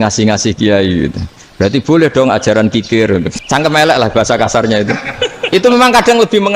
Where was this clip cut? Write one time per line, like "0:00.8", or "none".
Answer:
0:03.4